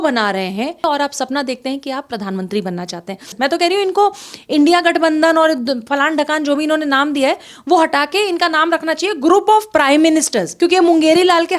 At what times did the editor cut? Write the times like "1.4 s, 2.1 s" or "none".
0.8 s, 3.3 s, 10.4 s